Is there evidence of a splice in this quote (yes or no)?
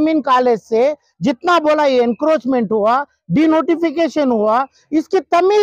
no